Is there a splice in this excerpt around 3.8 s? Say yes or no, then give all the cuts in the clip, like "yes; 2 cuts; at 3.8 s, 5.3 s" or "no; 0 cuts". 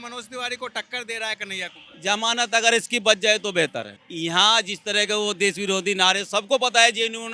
no; 0 cuts